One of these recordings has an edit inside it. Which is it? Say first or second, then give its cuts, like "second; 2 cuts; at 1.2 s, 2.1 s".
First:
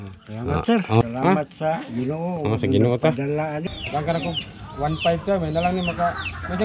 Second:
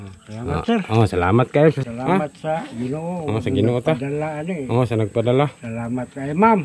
first; 2 cuts; at 1.0 s, 3.7 s